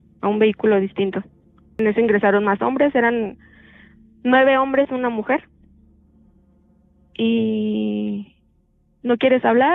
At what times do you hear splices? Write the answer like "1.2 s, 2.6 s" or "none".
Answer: 1.6 s